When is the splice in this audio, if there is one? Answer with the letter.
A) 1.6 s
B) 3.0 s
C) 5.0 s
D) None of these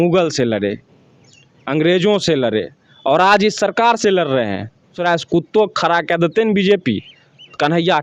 C